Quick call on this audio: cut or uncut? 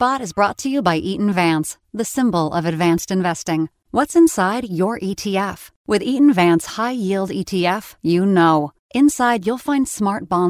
uncut